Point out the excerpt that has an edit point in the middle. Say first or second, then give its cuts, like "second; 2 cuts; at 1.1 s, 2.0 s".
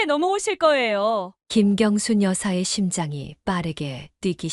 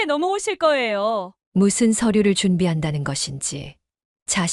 second; 1 cut; at 1.4 s